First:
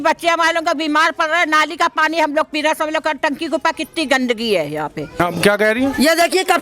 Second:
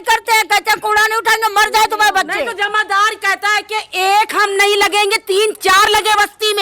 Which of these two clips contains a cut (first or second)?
first